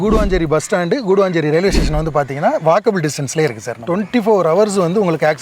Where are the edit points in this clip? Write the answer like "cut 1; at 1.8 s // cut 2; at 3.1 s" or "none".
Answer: cut 1; at 3.8 s